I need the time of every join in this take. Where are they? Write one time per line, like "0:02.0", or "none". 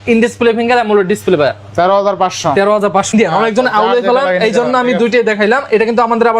0:03.1